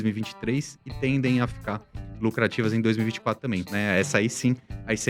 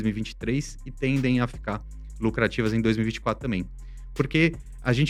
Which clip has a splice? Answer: first; 1 cut; at 3.7 s

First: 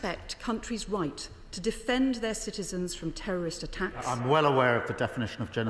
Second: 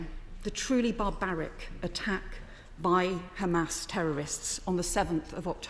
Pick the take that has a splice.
first; 1 cut; at 4.1 s

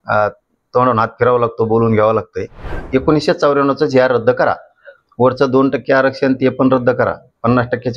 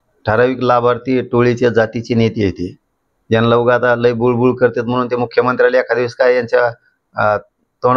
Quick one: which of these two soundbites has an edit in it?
first; 1 cut; at 2.8 s

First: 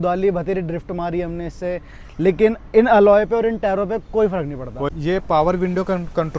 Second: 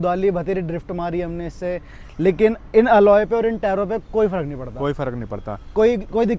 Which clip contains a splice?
first; 1 cut; at 4.9 s

